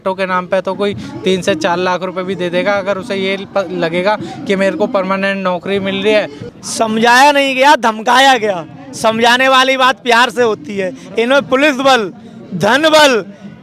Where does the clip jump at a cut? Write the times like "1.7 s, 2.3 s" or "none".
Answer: 6.4 s